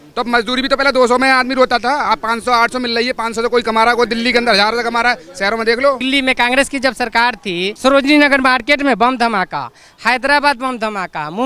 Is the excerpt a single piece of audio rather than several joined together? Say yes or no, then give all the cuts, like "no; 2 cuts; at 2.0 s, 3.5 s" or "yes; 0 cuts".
no; 2 cuts; at 6.0 s, 7.7 s